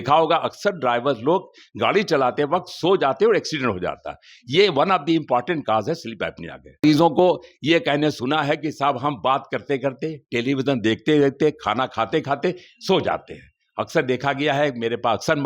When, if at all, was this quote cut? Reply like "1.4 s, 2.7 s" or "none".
6.8 s